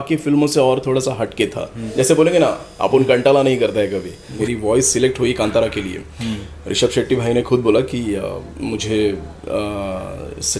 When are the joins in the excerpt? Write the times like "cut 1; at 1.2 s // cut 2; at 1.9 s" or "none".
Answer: cut 1; at 1.8 s // cut 2; at 4.2 s